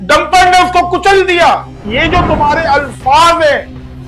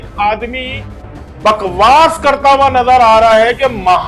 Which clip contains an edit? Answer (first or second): first